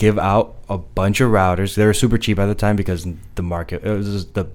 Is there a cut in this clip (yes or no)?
no